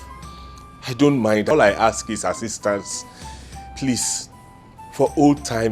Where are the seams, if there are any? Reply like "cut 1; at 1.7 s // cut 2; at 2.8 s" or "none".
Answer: cut 1; at 1.5 s